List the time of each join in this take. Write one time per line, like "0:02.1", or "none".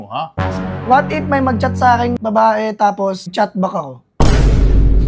0:02.2
0:03.3